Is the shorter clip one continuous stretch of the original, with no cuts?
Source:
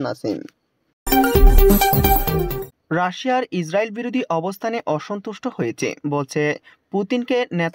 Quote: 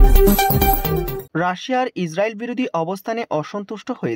no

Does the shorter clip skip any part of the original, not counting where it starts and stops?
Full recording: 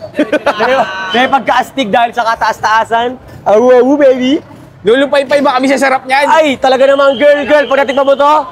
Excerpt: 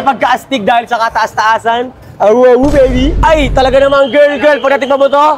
yes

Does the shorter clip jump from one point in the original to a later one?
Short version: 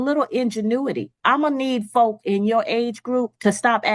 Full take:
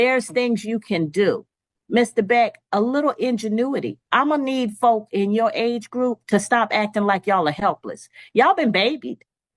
no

